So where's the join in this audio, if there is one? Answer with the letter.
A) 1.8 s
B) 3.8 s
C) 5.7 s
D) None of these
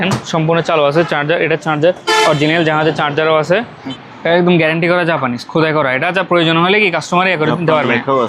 B